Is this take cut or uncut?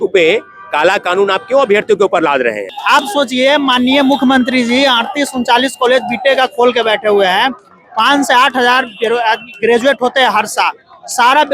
cut